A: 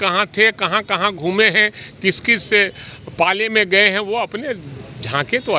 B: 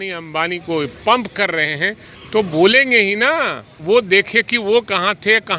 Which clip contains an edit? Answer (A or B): B